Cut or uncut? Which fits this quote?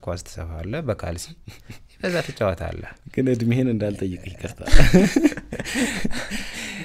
uncut